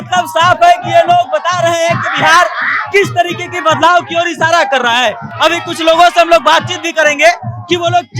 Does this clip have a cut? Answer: no; 0 cuts

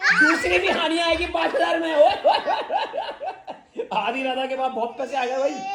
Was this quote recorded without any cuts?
yes; 0 cuts

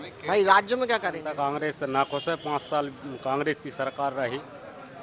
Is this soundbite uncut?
no; 1 cut; at 1.2 s

